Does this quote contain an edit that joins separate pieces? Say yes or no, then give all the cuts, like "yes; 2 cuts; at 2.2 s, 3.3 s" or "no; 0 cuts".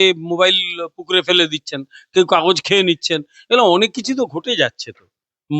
no; 0 cuts